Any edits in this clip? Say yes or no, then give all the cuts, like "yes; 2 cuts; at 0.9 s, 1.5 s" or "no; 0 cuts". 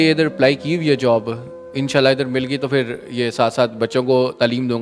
no; 0 cuts